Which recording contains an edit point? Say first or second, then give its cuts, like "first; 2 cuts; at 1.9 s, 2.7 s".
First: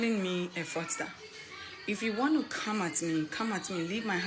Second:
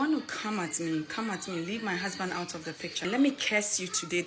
second; 1 cut; at 3.0 s